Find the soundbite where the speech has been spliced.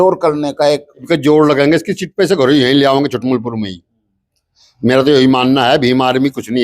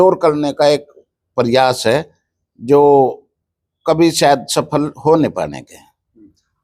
first; 1 cut; at 1.0 s

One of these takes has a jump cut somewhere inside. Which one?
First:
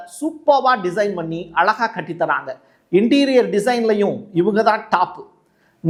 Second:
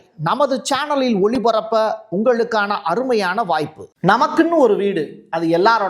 second; 1 cut; at 3.8 s

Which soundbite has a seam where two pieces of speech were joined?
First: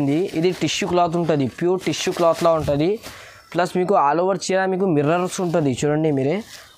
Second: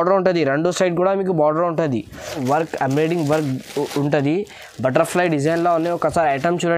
second; 1 cut; at 2.4 s

